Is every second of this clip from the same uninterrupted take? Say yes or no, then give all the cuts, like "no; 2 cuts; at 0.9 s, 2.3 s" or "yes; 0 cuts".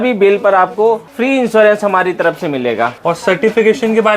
yes; 0 cuts